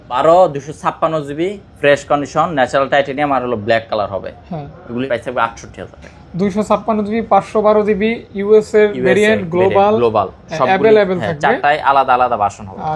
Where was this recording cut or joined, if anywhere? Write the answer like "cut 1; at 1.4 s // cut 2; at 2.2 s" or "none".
cut 1; at 5.0 s